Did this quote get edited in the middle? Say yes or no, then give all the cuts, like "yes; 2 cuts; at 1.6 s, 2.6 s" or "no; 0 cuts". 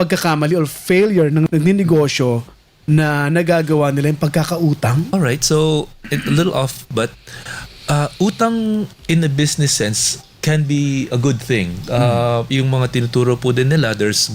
yes; 2 cuts; at 1.5 s, 5.1 s